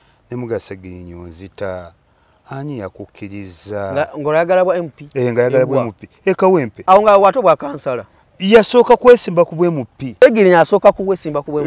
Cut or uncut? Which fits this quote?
cut